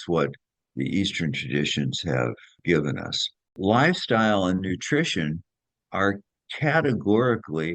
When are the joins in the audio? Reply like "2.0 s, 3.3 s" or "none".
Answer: 3.6 s